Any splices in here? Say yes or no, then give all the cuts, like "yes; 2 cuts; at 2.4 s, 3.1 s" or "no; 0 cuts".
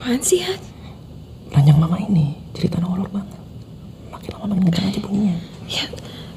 no; 0 cuts